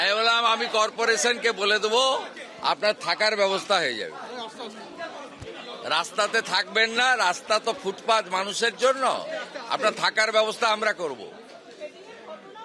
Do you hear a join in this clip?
no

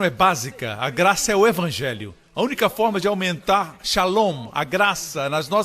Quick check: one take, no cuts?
no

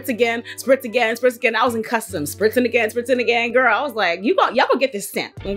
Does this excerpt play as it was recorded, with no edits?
yes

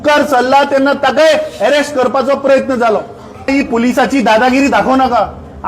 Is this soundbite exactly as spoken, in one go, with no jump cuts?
no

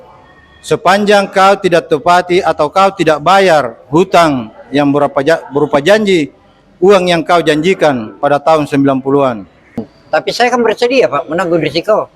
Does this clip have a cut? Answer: yes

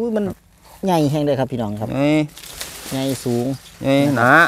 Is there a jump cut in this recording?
no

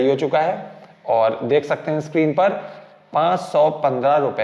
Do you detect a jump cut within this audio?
no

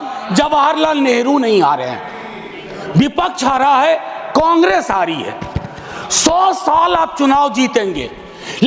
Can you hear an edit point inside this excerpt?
no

